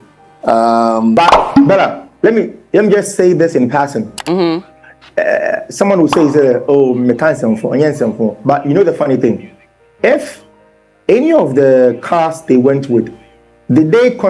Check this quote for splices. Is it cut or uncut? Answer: cut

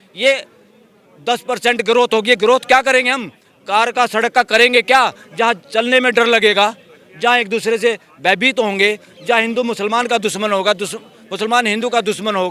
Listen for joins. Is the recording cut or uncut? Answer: uncut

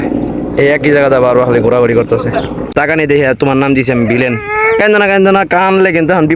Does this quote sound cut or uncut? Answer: cut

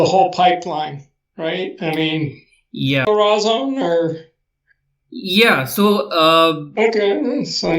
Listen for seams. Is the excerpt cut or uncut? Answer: cut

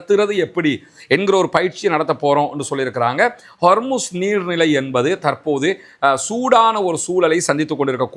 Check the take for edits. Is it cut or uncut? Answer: uncut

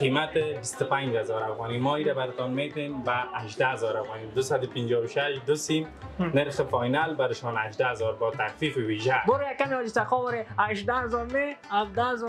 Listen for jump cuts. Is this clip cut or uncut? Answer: uncut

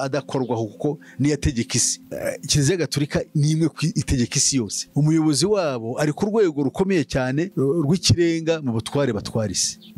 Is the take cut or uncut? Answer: cut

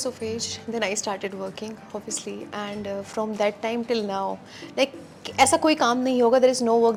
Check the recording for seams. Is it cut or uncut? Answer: uncut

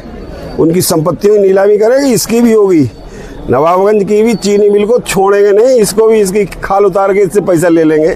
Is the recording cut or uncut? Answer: uncut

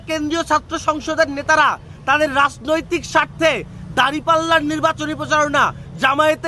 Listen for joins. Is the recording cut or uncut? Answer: uncut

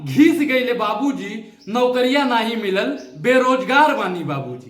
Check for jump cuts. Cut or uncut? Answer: uncut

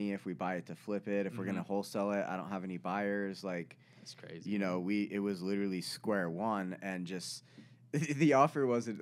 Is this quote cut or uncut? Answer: uncut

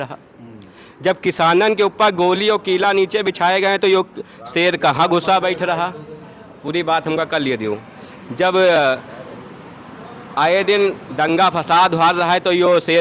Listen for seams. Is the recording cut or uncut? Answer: uncut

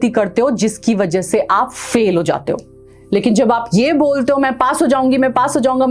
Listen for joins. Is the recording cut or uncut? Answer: uncut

